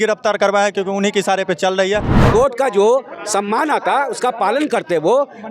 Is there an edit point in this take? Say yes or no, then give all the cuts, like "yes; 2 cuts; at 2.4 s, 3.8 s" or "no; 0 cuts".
yes; 1 cut; at 2.2 s